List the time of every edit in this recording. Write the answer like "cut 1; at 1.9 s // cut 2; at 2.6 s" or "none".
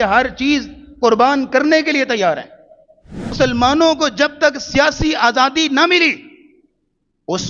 cut 1; at 3.3 s